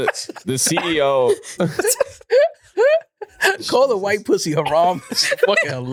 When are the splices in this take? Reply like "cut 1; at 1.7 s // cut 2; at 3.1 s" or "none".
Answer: none